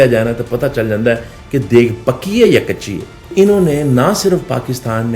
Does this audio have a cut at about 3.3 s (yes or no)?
yes